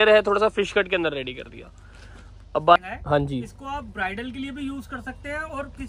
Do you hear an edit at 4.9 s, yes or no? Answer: no